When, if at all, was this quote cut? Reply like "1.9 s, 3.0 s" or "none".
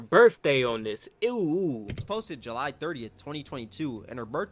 none